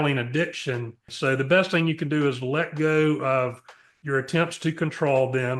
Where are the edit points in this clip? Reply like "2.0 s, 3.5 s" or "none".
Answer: 1.1 s